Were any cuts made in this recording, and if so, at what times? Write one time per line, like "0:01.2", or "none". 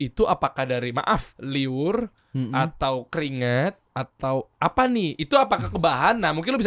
0:01.4
0:03.9